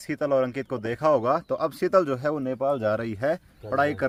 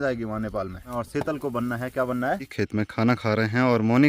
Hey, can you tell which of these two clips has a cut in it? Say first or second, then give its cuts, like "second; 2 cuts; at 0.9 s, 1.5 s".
second; 2 cuts; at 0.9 s, 2.5 s